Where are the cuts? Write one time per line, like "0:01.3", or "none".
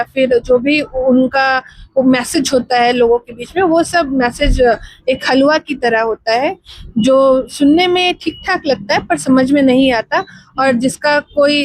none